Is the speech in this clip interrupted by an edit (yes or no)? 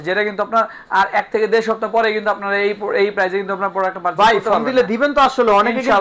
no